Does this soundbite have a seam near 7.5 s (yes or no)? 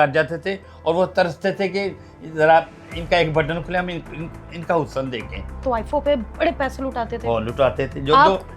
no